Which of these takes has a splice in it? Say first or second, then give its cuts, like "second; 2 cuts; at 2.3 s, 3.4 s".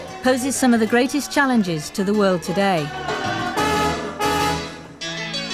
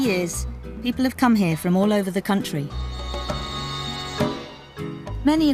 first; 1 cut; at 3.8 s